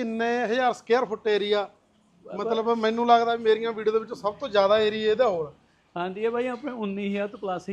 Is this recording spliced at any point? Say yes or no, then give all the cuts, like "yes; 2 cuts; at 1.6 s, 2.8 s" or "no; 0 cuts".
no; 0 cuts